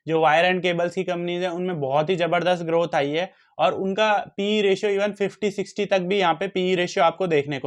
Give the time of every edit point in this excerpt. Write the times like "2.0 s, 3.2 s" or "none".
none